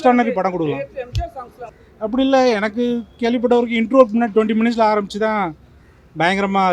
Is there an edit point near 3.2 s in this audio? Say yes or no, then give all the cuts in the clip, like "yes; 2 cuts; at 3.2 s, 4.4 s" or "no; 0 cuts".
no; 1 cut; at 1.6 s